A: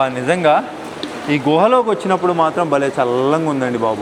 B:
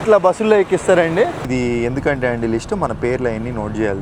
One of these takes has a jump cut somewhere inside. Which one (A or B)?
B